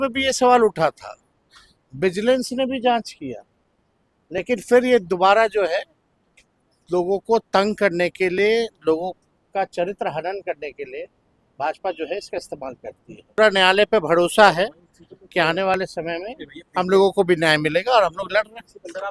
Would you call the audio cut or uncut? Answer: cut